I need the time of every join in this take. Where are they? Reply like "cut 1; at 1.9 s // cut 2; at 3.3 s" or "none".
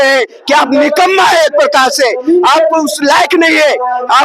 none